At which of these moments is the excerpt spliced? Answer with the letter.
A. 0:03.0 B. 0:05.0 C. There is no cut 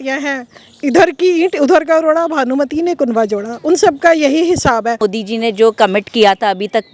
B